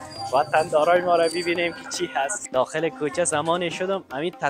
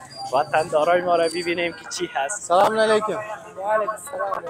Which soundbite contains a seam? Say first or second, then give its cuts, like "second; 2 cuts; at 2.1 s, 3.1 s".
first; 1 cut; at 2.4 s